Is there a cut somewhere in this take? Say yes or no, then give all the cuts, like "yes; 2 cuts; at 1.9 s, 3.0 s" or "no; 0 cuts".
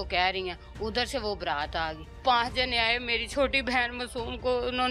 yes; 1 cut; at 2.2 s